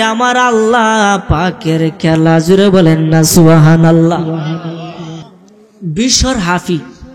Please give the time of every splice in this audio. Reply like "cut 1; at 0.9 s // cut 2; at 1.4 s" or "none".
cut 1; at 5.3 s